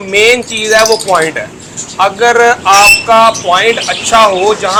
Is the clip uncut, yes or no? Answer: yes